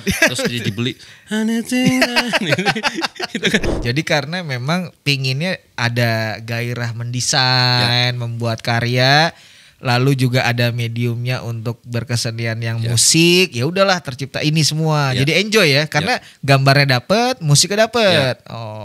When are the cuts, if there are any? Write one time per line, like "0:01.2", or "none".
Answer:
0:03.7